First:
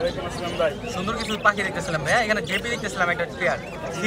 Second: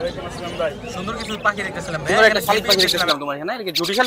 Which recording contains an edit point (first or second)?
second